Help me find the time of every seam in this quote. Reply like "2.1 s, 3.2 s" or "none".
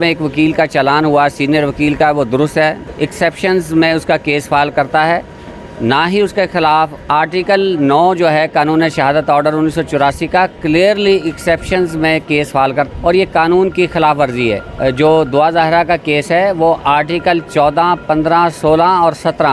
2.8 s, 7.0 s, 12.9 s, 14.7 s